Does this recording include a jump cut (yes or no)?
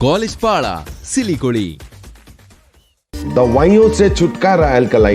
no